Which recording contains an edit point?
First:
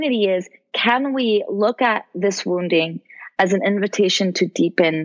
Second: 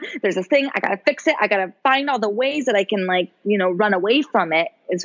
second; 1 cut; at 1.7 s

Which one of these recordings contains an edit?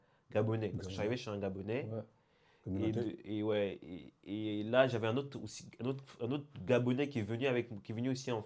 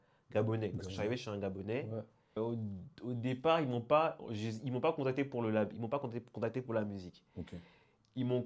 second; 1 cut; at 2.4 s

